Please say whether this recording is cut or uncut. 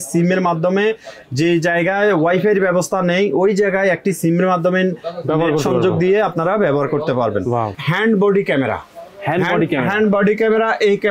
cut